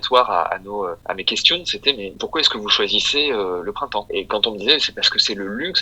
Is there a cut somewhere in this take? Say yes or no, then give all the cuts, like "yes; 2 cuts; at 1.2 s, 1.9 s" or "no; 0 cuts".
yes; 1 cut; at 4.1 s